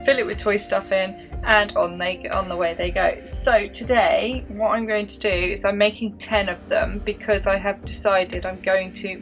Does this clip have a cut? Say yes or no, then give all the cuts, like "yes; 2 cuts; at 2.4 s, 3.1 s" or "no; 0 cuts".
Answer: no; 0 cuts